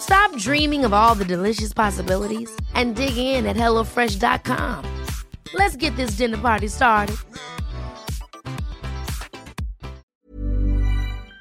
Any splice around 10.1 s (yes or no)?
yes